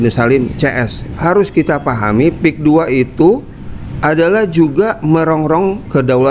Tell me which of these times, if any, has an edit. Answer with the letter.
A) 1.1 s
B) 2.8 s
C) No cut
A